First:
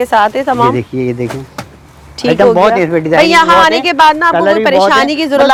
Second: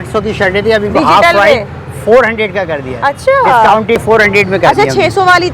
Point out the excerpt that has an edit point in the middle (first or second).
second